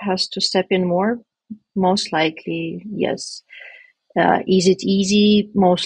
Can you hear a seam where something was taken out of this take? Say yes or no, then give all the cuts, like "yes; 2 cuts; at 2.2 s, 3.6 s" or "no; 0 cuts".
no; 0 cuts